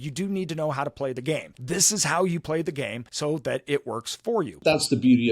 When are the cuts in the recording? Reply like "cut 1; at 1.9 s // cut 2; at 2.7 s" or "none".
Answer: cut 1; at 1.5 s // cut 2; at 3.0 s // cut 3; at 4.5 s